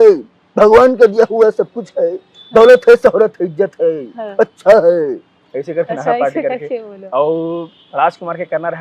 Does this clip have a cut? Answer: no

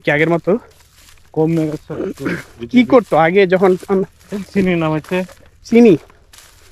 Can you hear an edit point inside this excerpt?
no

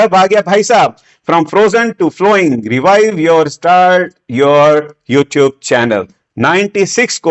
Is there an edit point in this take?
no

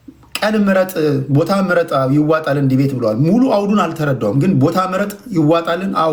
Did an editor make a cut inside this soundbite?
no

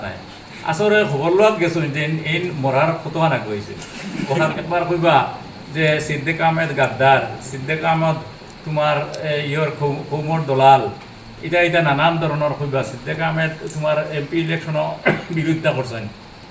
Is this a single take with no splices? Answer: no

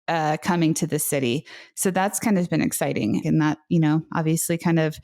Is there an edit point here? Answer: yes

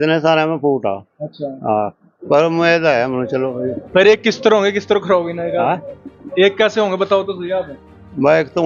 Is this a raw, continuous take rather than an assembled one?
yes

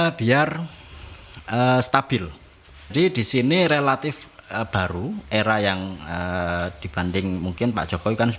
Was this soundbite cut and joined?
yes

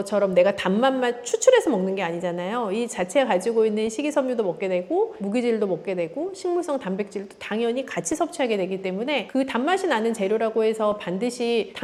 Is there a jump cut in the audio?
no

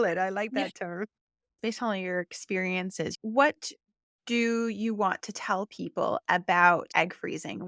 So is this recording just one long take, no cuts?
no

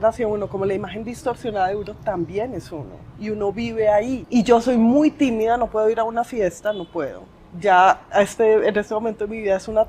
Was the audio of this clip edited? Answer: yes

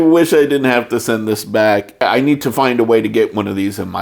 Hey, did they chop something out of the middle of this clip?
yes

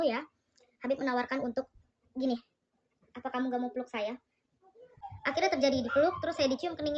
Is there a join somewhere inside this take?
yes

